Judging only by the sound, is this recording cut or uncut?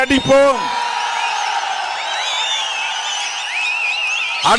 uncut